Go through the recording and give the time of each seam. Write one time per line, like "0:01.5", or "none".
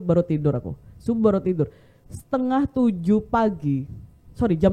none